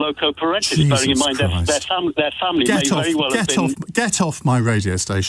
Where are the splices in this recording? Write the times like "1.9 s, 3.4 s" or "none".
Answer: none